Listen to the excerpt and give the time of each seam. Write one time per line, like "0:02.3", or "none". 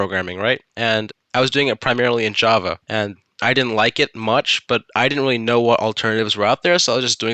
0:01.0
0:02.8